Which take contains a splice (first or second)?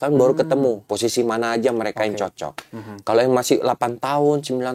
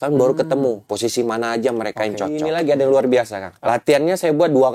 second